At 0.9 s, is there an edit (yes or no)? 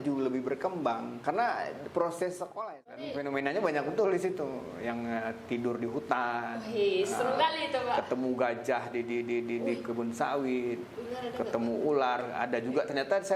no